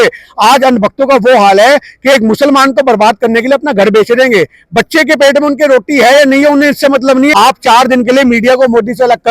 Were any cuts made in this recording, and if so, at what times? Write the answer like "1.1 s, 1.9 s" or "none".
7.3 s